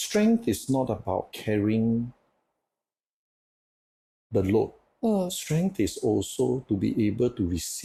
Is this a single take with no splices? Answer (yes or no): yes